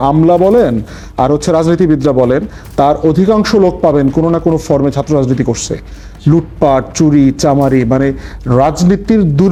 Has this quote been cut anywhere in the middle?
no; 0 cuts

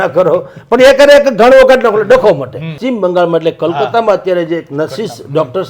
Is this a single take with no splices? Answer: no; 1 cut; at 2.8 s

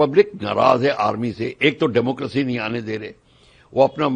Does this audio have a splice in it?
no; 0 cuts

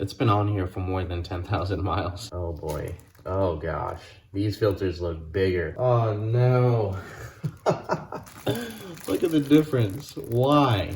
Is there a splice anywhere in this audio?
yes; 2 cuts; at 2.2 s, 5.7 s

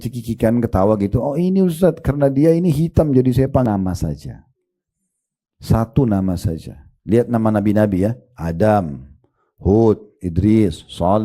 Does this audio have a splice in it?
yes; 1 cut; at 3.6 s

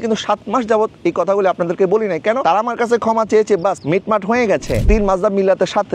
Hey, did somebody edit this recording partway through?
yes; 2 cuts; at 3.8 s, 4.9 s

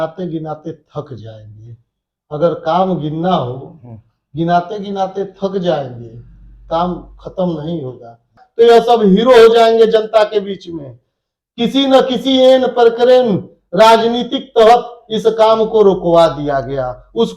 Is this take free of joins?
no; 1 cut; at 8.4 s

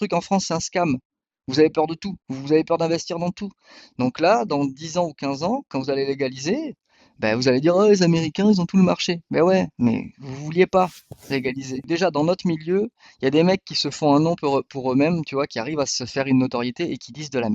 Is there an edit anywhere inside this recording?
yes; 1 cut; at 11.8 s

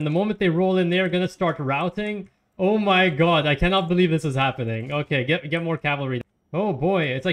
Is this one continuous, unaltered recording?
no; 1 cut; at 6.2 s

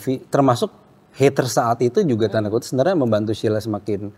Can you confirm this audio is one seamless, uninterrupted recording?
yes; 0 cuts

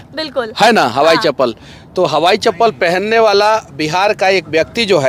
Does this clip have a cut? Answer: no; 0 cuts

